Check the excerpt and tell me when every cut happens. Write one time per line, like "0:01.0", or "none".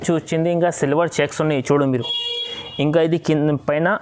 none